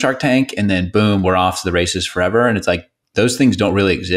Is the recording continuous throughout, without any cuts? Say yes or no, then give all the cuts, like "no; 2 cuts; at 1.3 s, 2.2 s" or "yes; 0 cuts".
no; 1 cut; at 2.9 s